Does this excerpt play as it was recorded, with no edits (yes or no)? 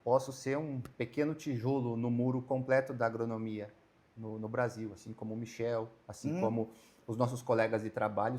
yes